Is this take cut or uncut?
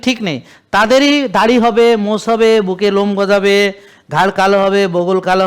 uncut